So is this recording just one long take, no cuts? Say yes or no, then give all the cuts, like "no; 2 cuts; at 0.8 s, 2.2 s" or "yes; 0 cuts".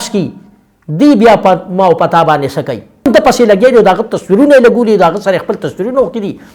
no; 1 cut; at 3.1 s